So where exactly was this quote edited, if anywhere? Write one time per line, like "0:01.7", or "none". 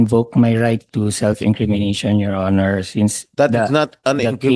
none